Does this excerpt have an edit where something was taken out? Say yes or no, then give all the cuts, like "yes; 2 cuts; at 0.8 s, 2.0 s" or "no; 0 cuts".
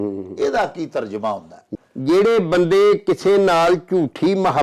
yes; 1 cut; at 1.5 s